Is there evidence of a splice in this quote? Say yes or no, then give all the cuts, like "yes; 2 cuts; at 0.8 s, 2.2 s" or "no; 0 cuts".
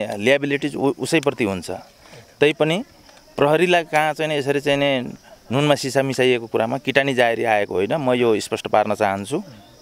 no; 0 cuts